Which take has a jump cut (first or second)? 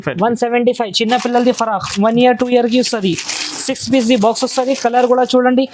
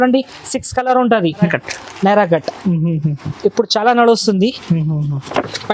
second